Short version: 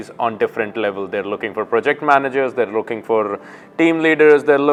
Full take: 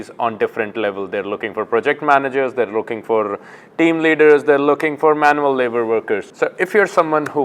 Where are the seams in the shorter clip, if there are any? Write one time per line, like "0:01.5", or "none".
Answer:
none